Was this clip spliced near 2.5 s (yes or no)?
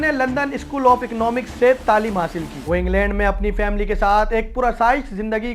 yes